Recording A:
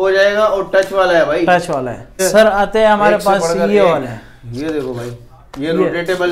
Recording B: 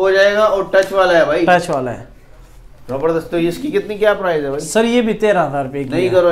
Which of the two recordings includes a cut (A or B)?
A